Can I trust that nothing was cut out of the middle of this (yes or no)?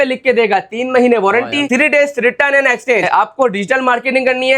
no